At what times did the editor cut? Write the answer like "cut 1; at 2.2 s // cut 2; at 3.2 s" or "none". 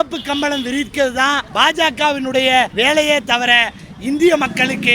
cut 1; at 1.5 s // cut 2; at 2.7 s